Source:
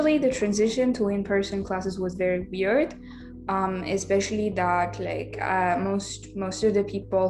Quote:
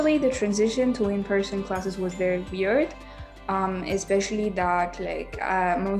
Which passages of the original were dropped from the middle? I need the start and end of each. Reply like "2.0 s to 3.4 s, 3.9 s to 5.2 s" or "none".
none